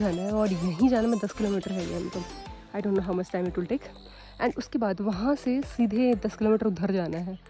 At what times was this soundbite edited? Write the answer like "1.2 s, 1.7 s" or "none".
none